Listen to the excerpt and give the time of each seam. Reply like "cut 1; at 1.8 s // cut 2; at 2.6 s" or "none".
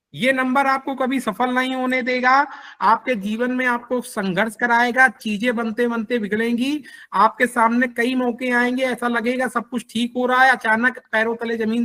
none